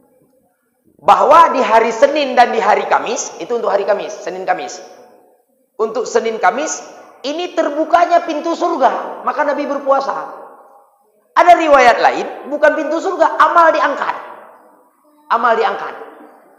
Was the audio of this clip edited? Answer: no; 0 cuts

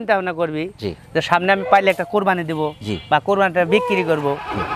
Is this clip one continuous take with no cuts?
yes; 0 cuts

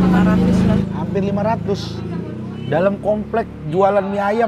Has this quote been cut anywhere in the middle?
no; 0 cuts

